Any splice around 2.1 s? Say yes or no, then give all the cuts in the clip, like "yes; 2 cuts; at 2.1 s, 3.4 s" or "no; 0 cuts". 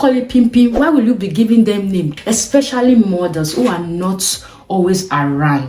yes; 1 cut; at 2.1 s